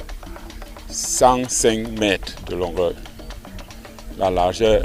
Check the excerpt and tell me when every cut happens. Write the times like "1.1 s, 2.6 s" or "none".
none